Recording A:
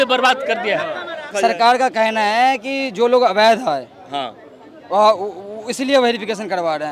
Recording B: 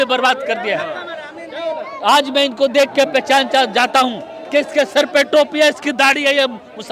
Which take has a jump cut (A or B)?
A